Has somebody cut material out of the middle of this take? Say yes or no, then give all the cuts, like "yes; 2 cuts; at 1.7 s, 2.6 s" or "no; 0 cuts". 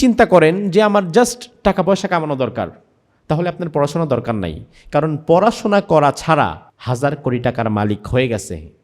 yes; 1 cut; at 6.7 s